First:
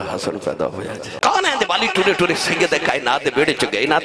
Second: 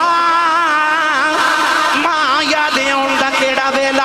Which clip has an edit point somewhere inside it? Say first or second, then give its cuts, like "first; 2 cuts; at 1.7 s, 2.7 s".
first; 1 cut; at 1.1 s